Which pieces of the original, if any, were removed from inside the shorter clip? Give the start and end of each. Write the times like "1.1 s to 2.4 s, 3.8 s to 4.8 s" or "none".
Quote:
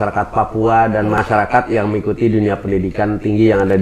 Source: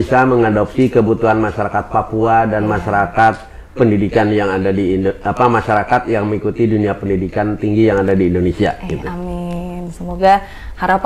2.8 s to 5.6 s